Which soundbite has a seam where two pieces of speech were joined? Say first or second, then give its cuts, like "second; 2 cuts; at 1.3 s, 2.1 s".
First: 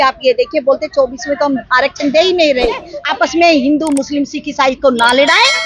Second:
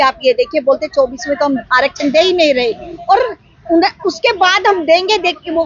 first; 1 cut; at 2.9 s